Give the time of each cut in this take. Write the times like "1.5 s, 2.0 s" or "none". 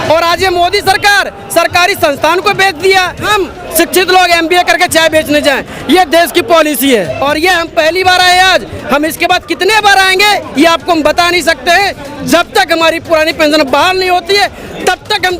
3.2 s, 7.2 s